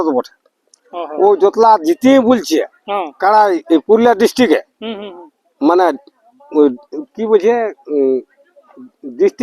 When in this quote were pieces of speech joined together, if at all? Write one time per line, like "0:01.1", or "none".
0:01.0